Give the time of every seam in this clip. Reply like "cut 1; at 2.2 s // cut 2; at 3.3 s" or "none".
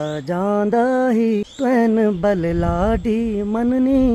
cut 1; at 1.5 s